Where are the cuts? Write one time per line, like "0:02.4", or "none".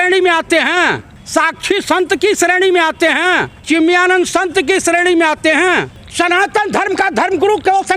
0:01.1
0:03.5
0:06.0